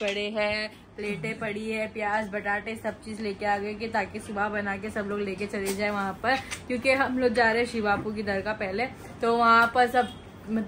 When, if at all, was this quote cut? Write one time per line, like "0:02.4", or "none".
none